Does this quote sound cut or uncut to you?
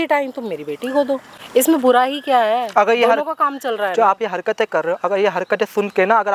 uncut